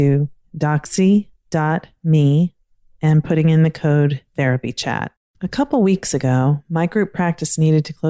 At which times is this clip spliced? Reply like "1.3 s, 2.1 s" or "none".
5.2 s

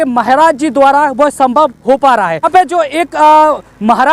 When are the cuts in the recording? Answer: 2.5 s

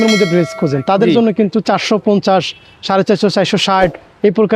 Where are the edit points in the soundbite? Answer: none

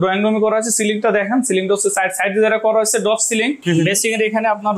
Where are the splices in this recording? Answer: 3.6 s

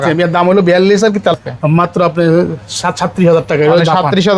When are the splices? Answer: 1.3 s

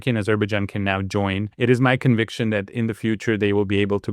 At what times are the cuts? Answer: 1.5 s

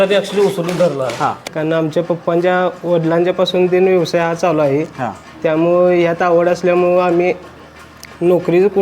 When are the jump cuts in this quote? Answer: 1.5 s

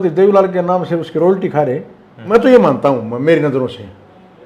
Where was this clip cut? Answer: 2.3 s

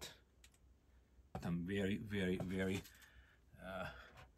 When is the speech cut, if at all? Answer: 1.4 s

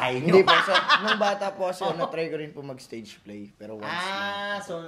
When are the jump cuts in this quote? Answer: none

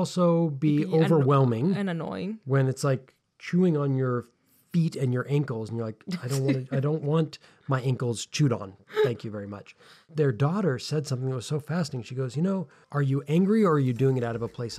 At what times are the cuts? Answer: 10.0 s, 12.8 s

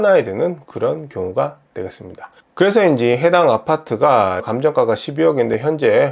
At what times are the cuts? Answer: 4.5 s

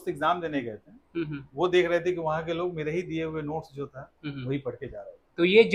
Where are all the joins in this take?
none

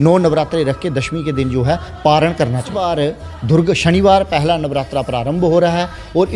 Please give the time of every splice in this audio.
2.8 s

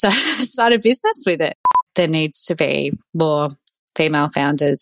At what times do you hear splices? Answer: 1.8 s

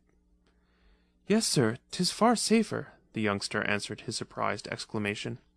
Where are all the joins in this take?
3.9 s

